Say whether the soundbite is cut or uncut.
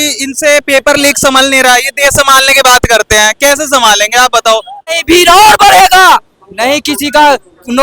cut